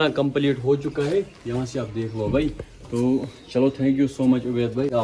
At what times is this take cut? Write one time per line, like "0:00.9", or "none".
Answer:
none